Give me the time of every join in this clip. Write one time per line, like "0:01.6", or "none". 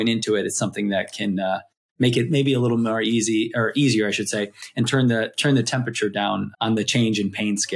0:06.5